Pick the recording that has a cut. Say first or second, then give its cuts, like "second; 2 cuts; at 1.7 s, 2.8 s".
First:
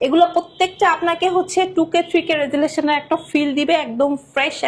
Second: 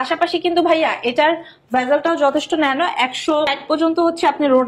second; 1 cut; at 3.6 s